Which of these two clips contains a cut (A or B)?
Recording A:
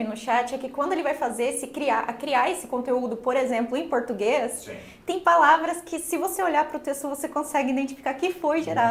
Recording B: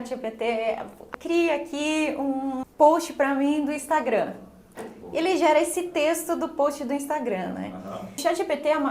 B